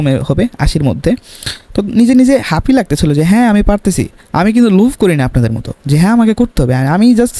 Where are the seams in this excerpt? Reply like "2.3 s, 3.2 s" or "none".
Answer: none